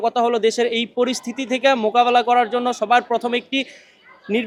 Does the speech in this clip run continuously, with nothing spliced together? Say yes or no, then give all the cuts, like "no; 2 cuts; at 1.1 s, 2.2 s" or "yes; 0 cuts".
yes; 0 cuts